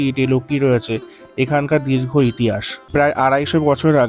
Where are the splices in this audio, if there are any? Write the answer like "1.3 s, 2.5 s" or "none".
3.1 s